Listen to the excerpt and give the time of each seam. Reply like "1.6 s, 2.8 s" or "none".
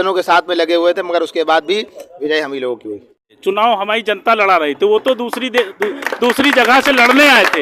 3.3 s